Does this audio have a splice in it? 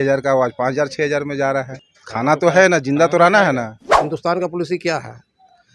yes; 2 cuts; at 1.8 s, 3.9 s

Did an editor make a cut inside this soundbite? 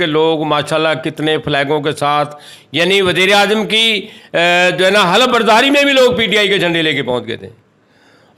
no; 0 cuts

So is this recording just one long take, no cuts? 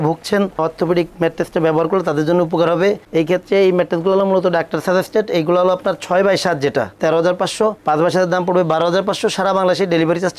yes; 0 cuts

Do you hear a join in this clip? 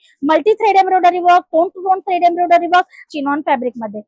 yes; 1 cut; at 3.0 s

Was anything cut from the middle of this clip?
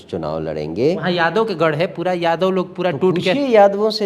yes; 1 cut; at 1.0 s

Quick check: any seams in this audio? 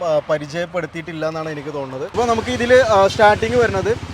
yes; 1 cut; at 2.2 s

